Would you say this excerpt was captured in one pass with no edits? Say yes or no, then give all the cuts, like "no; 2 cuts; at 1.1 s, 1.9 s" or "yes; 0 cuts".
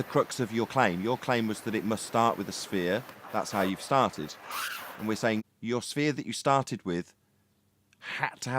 no; 1 cut; at 5.4 s